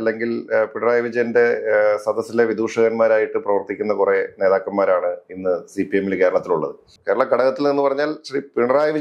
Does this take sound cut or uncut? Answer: cut